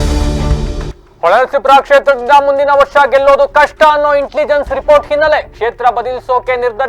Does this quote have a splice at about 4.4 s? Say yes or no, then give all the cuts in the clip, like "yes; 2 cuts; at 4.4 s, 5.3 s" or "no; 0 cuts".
no; 1 cut; at 0.9 s